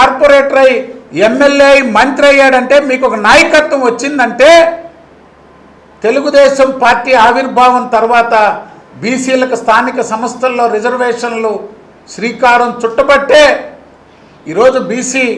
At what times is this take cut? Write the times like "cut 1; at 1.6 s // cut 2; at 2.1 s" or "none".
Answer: none